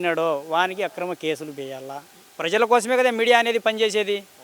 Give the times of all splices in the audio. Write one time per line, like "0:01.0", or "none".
0:02.3